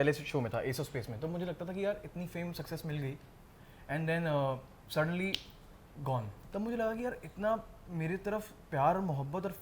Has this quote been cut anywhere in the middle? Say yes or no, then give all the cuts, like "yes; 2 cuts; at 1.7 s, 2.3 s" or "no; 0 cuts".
yes; 2 cuts; at 4.8 s, 6.4 s